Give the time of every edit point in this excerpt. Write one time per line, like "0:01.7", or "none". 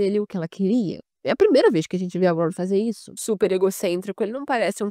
0:03.1